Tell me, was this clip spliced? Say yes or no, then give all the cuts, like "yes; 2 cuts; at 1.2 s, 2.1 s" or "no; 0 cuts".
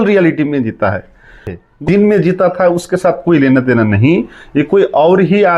yes; 1 cut; at 1.8 s